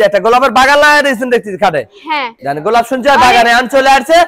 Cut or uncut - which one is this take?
uncut